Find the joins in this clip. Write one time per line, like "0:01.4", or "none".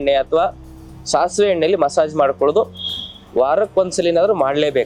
none